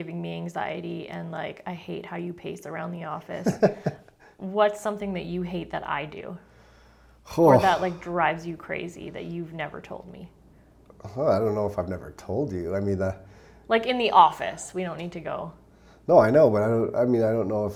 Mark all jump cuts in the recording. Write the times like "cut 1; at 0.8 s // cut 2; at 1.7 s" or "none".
none